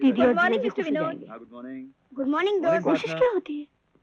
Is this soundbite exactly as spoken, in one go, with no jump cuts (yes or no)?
yes